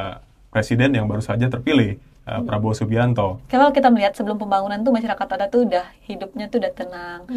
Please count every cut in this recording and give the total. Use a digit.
1